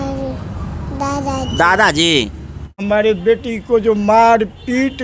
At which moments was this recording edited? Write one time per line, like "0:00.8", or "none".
0:02.8

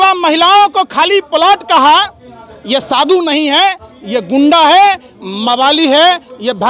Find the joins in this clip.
none

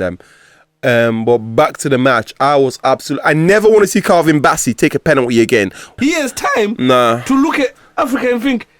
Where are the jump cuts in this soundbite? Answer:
0:06.0

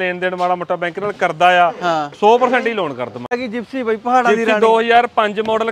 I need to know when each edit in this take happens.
0:03.4

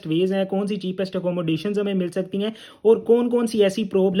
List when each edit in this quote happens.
none

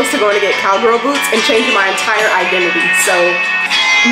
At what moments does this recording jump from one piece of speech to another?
none

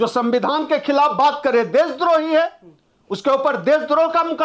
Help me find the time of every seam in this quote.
none

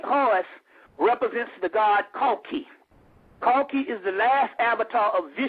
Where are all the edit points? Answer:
0:02.1

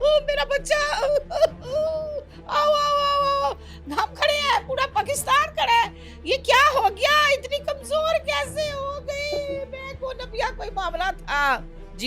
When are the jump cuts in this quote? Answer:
none

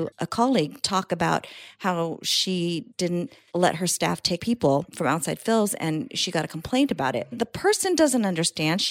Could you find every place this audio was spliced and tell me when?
0:03.2
0:04.4
0:07.5

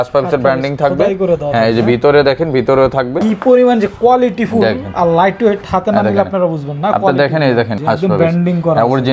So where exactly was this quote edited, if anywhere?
0:03.2
0:07.8

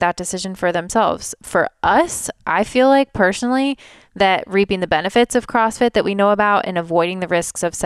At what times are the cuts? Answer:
0:01.4

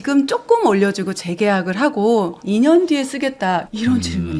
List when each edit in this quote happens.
none

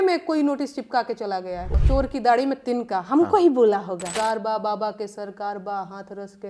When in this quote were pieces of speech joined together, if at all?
0:01.7
0:04.2

